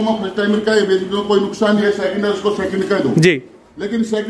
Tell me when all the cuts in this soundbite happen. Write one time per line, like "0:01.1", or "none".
none